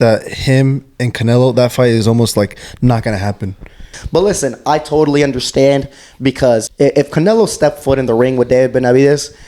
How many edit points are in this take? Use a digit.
2